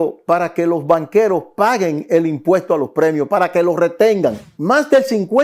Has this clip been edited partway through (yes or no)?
yes